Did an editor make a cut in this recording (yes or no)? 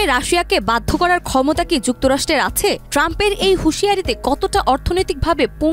no